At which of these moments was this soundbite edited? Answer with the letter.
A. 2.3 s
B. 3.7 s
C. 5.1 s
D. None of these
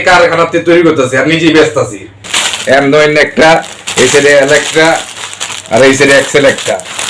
A